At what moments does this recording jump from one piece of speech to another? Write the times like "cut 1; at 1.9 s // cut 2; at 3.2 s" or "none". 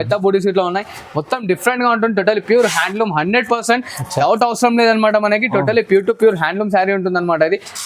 none